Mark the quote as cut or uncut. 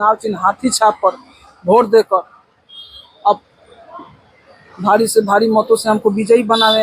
uncut